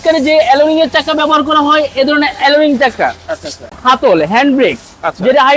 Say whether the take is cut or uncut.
cut